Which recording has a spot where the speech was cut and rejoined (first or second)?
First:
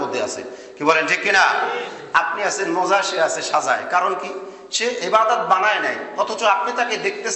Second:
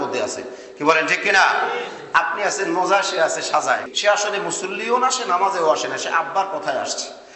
second